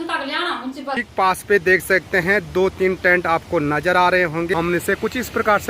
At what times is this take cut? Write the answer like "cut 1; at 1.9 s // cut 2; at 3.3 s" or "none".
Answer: cut 1; at 1.1 s // cut 2; at 4.5 s